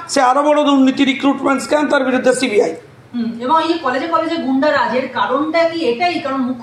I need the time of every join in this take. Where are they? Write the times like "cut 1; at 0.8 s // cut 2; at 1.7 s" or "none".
none